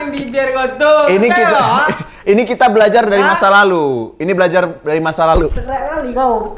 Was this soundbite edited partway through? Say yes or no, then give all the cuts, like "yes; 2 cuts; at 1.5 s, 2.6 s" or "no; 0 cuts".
no; 0 cuts